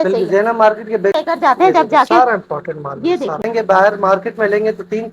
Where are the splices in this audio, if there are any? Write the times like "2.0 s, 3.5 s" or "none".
1.2 s, 3.5 s